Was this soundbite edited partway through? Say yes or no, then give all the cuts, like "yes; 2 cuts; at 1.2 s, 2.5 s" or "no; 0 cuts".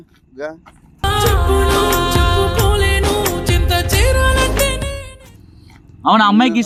no; 0 cuts